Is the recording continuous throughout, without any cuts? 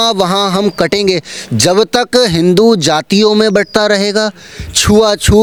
yes; 0 cuts

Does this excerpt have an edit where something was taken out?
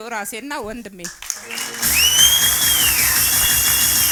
no; 0 cuts

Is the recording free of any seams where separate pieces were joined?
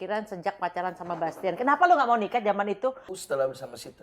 no; 1 cut; at 3.1 s

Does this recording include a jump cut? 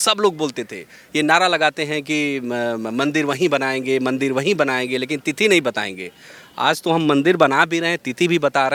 no; 0 cuts

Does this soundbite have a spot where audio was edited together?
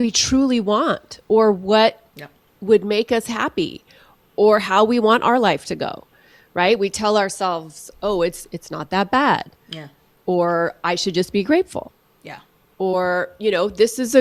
no; 0 cuts

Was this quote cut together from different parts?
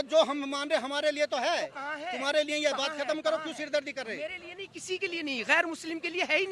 no; 0 cuts

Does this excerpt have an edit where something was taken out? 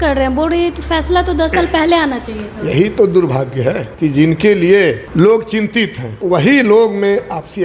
yes; 3 cuts; at 3.9 s, 5.0 s, 6.2 s

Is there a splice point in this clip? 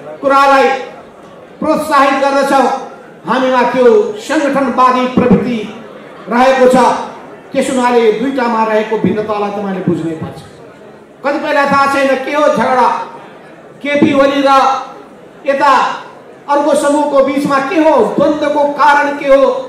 no; 0 cuts

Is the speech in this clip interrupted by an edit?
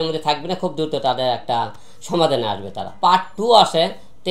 yes; 1 cut; at 2.9 s

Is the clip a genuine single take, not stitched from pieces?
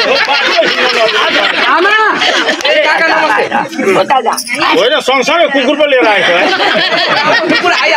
yes; 0 cuts

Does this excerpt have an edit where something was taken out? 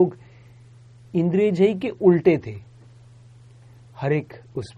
no; 0 cuts

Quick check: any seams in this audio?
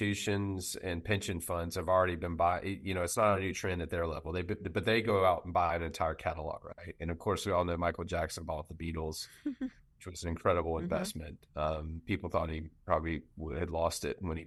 no; 0 cuts

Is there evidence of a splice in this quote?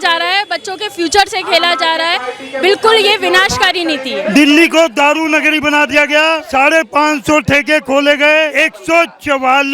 yes; 3 cuts; at 4.1 s, 6.4 s, 8.5 s

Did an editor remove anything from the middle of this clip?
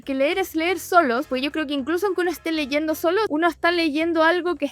yes; 1 cut; at 3.3 s

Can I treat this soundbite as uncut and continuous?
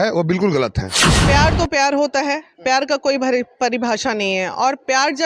no; 1 cut; at 1.2 s

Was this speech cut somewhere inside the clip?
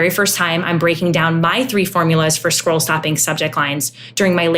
no; 0 cuts

